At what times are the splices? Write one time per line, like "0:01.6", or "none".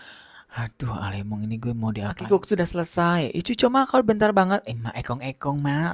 0:02.2